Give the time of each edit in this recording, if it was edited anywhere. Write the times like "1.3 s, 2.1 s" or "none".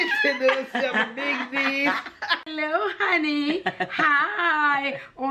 2.5 s